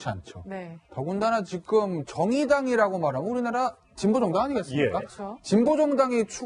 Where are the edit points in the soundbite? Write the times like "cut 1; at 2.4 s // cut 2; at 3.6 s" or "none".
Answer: cut 1; at 2.5 s